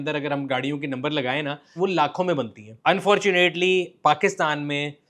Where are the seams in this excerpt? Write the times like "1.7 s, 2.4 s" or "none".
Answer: 2.6 s